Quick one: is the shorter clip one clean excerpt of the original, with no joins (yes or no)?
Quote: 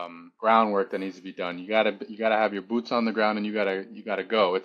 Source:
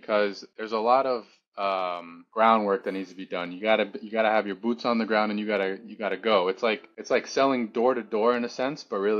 yes